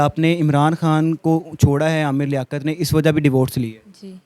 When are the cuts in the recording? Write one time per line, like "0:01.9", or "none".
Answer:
none